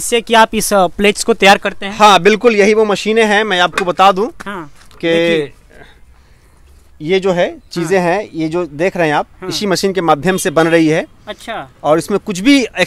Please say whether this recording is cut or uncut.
uncut